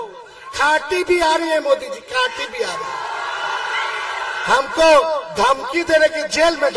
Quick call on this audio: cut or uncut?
uncut